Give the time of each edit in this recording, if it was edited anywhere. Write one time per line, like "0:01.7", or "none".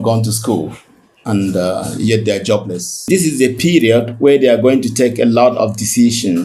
0:03.1